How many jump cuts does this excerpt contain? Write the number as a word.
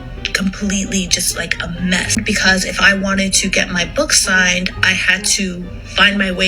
one